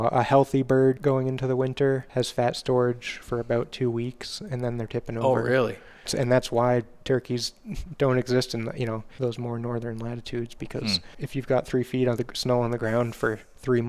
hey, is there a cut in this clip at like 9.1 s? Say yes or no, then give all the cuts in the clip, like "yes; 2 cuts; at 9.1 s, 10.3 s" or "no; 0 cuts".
yes; 5 cuts; at 1.0 s, 2.1 s, 6.1 s, 9.1 s, 11.1 s